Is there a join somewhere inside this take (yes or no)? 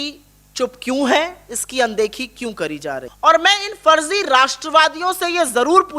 yes